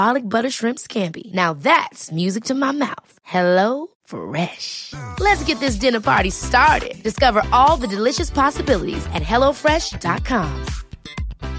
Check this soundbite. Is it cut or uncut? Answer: uncut